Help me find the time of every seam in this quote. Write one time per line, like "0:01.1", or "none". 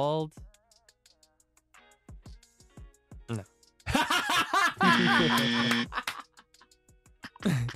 none